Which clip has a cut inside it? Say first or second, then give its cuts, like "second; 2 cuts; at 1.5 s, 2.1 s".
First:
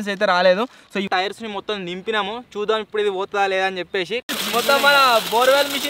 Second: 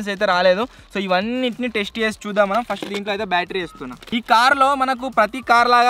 first; 2 cuts; at 1.1 s, 4.2 s